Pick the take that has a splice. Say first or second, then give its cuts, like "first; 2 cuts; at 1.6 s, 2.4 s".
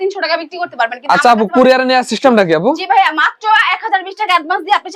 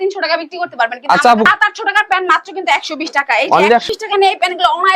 second; 2 cuts; at 1.5 s, 3.8 s